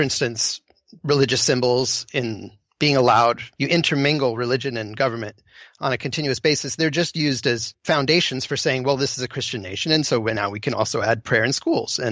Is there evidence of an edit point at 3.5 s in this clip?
yes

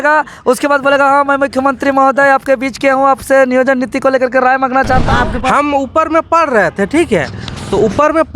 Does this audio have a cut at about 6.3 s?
no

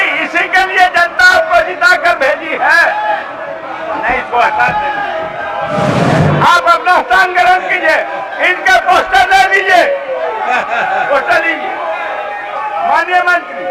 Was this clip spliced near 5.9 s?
yes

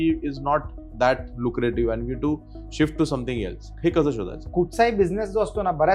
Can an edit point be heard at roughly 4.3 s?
yes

